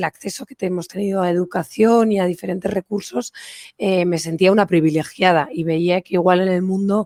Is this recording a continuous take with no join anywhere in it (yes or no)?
yes